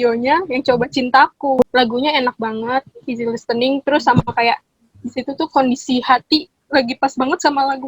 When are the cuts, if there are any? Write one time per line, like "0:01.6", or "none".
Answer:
0:01.7